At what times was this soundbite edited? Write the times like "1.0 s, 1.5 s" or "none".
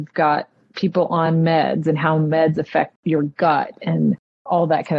3.0 s